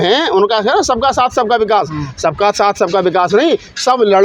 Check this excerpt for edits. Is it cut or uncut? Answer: uncut